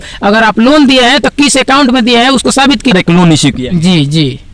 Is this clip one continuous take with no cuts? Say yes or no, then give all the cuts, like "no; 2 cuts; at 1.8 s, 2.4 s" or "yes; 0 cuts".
no; 1 cut; at 2.9 s